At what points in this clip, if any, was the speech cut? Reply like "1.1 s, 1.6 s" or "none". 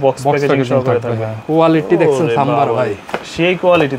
1.3 s